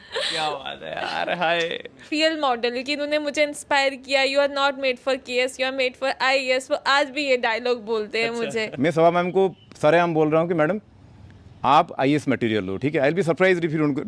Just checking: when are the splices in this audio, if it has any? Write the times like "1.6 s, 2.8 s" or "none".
2.1 s, 8.7 s